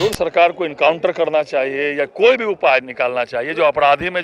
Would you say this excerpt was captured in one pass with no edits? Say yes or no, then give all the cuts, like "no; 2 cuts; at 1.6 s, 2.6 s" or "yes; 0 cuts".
yes; 0 cuts